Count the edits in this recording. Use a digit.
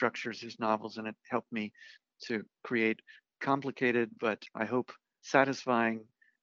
1